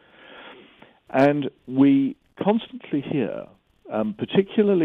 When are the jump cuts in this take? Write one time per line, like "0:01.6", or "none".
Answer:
none

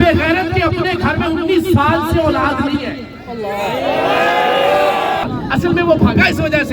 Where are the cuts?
0:05.2

